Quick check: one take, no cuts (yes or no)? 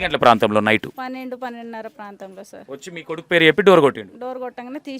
no